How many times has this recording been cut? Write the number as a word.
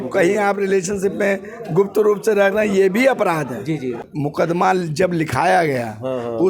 one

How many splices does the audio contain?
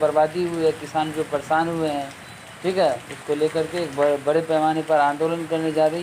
zero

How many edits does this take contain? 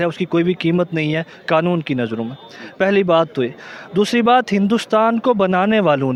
zero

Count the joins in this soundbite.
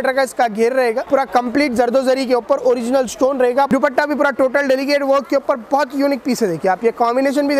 two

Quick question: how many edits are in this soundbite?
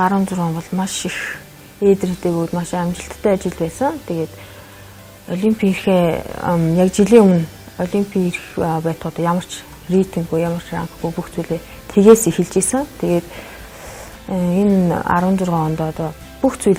one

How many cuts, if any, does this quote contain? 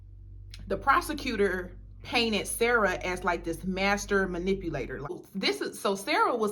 one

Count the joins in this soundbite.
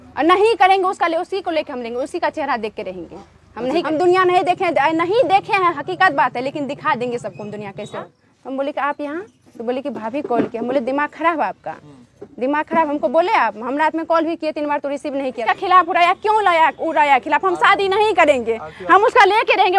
three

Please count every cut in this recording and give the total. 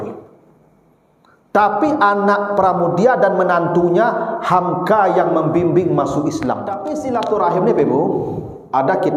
one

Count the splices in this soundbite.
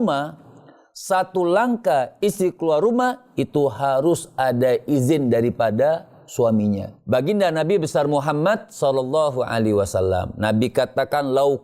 one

